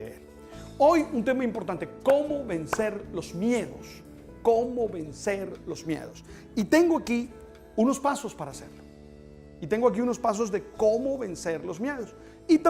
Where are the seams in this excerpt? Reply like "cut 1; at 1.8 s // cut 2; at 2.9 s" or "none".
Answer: none